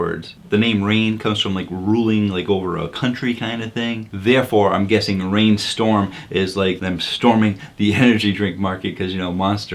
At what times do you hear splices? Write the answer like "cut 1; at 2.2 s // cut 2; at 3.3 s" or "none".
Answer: cut 1; at 6.8 s